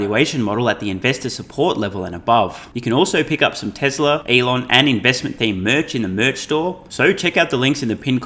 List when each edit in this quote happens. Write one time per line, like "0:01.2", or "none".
0:02.7
0:04.2
0:06.8